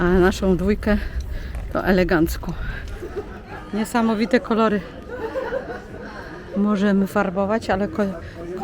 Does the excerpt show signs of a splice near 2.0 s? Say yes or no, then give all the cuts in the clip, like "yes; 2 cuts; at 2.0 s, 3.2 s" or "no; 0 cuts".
no; 1 cut; at 3.6 s